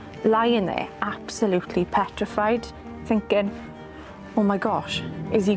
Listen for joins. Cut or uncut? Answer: cut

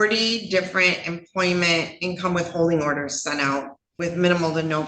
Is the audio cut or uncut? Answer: cut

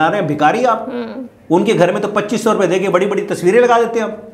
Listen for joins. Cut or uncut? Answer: uncut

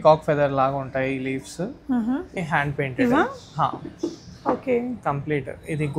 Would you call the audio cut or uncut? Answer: cut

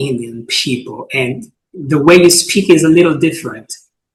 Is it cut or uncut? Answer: uncut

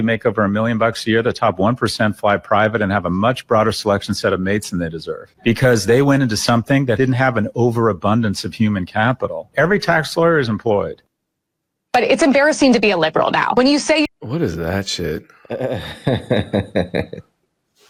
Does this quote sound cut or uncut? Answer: uncut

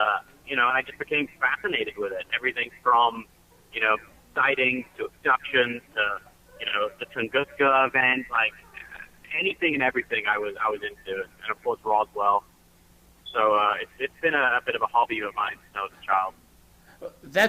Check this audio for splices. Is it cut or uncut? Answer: cut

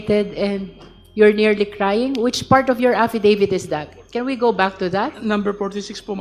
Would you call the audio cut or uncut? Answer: uncut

